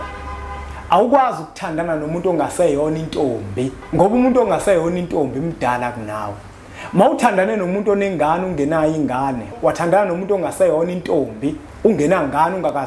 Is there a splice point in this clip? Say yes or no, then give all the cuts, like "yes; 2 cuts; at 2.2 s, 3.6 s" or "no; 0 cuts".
yes; 2 cuts; at 3.8 s, 11.7 s